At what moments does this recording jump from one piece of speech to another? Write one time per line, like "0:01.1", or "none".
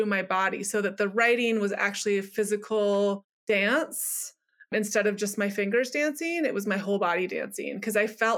0:03.3